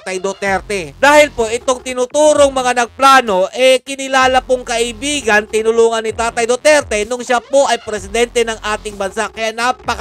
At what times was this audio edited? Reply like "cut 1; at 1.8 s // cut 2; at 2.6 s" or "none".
none